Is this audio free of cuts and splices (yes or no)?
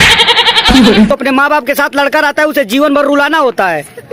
no